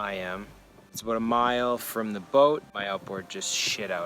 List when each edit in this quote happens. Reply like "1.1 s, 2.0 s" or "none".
1.0 s, 2.7 s